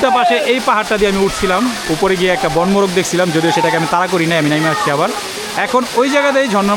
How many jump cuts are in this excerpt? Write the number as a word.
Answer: zero